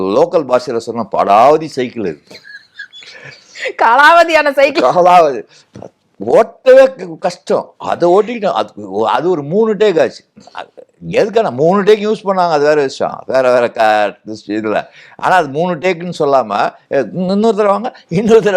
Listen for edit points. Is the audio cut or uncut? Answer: uncut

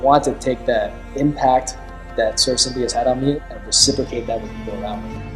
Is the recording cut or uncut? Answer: cut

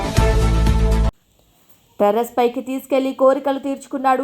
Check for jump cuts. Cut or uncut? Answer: uncut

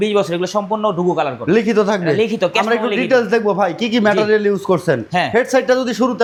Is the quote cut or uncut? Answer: uncut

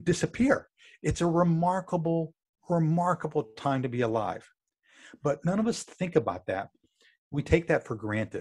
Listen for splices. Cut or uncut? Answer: uncut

